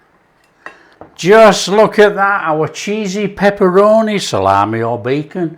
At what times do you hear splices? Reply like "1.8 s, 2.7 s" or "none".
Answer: 0.9 s